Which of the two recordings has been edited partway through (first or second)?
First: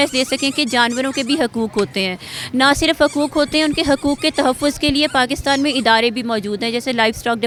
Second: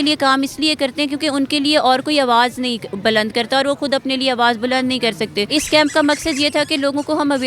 second